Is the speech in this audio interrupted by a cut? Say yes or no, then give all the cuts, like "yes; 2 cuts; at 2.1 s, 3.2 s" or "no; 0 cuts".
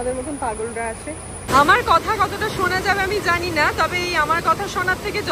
yes; 1 cut; at 1.5 s